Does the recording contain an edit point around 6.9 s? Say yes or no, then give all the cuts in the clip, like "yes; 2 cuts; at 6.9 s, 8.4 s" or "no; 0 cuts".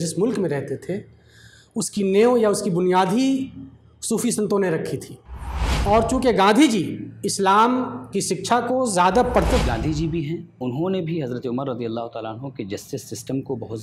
no; 2 cuts; at 5.7 s, 9.6 s